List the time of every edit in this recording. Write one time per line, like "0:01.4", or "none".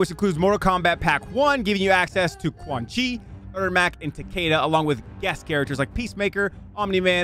none